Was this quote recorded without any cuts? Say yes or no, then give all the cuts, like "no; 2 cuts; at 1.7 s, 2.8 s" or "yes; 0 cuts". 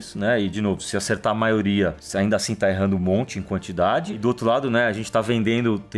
no; 2 cuts; at 2.0 s, 4.2 s